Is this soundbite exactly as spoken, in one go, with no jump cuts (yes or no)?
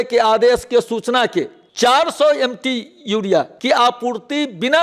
no